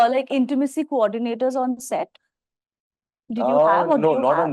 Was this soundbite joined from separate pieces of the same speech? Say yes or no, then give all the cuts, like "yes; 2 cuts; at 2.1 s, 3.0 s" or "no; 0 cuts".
no; 0 cuts